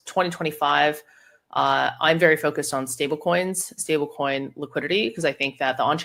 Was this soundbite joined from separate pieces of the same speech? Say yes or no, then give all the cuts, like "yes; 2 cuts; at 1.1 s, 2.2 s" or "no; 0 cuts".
no; 0 cuts